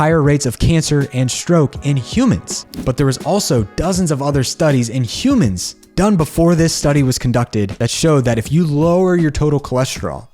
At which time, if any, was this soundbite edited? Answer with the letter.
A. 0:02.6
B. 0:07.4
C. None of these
A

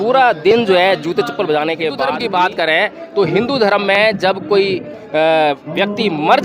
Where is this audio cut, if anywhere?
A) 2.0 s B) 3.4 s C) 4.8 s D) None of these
A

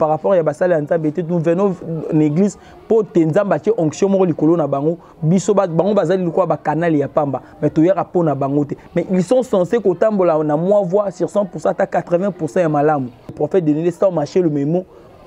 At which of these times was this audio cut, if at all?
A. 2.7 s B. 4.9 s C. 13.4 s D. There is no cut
C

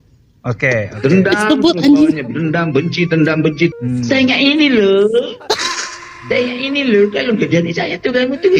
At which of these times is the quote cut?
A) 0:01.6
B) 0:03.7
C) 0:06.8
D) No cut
B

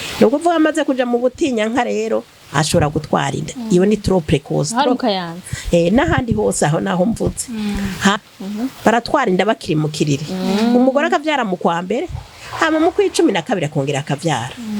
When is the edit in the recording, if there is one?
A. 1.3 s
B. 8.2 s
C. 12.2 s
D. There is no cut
B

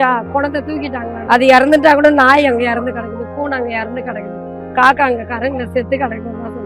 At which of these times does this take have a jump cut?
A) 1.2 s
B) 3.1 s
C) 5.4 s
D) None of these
A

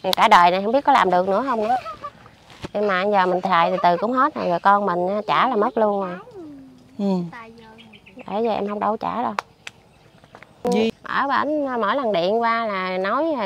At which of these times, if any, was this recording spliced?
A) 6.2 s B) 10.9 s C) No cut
B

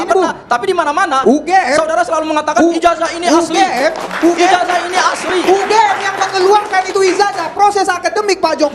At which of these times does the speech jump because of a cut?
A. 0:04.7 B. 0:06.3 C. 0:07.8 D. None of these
D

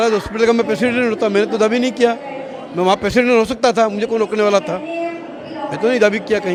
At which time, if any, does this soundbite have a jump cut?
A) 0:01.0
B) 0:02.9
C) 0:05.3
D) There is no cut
D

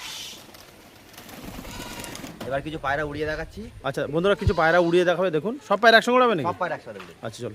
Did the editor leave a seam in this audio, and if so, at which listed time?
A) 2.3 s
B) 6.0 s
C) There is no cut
A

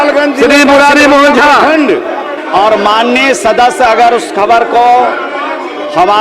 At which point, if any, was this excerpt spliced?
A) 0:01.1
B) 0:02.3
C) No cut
B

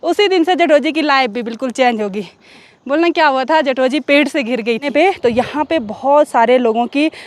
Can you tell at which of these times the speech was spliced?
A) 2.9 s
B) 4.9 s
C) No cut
B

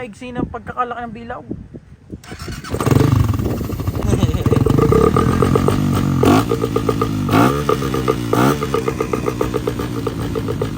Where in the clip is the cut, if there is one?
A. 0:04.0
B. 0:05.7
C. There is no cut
A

